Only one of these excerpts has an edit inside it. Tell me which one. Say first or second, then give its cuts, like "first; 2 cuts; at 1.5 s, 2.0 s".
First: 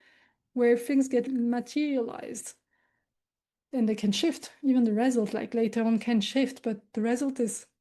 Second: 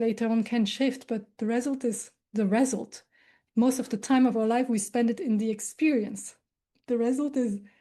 first; 1 cut; at 1.3 s